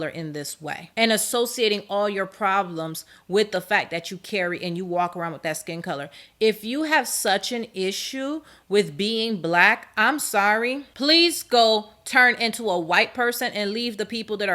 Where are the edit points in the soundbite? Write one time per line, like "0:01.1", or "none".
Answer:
none